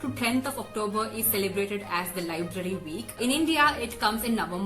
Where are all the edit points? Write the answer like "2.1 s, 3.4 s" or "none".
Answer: 3.2 s